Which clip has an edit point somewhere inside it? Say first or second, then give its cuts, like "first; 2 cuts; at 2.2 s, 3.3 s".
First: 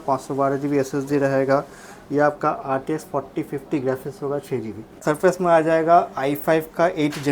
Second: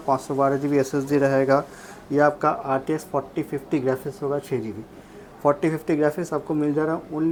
first; 1 cut; at 5.0 s